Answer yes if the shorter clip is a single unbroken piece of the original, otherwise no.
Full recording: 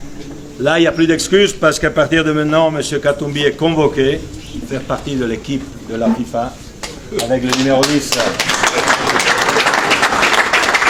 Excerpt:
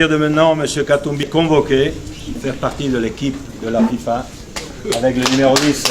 no